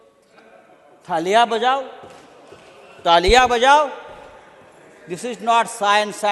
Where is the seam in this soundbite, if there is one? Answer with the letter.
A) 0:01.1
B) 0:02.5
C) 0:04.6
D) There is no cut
D